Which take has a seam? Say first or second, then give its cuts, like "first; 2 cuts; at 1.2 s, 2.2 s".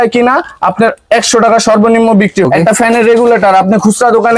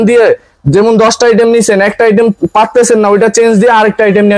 first; 1 cut; at 2.5 s